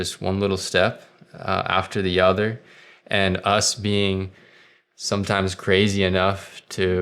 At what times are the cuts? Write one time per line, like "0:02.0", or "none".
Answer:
none